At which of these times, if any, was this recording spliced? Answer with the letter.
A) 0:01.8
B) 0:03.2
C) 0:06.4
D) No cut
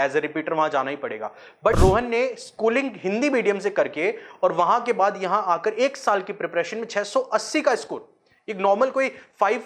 A